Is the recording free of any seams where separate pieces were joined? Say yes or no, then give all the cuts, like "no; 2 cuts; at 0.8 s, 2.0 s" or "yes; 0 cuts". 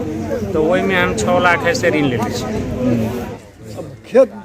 no; 1 cut; at 3.3 s